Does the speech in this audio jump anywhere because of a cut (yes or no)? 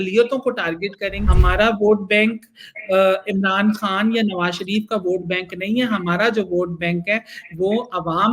yes